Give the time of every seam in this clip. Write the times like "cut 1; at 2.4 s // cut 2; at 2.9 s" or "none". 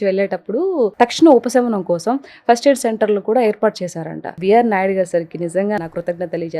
cut 1; at 0.9 s // cut 2; at 4.2 s // cut 3; at 5.8 s